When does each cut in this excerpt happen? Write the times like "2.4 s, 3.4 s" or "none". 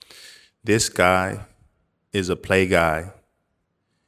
none